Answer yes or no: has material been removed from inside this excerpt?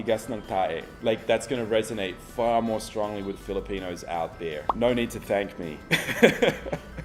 no